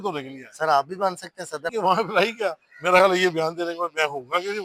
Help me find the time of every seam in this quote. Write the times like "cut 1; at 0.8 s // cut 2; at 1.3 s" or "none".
cut 1; at 1.7 s